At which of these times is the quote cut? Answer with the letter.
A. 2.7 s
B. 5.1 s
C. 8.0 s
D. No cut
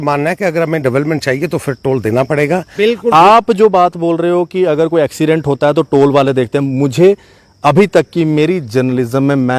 A